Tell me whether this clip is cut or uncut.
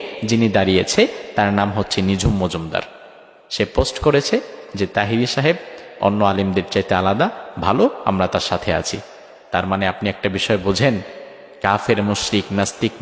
uncut